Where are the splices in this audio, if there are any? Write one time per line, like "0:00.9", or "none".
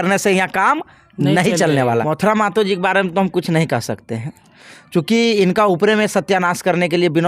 0:02.0